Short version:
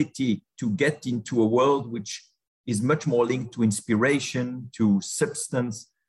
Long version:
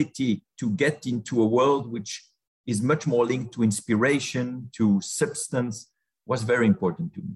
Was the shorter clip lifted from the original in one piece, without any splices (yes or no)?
yes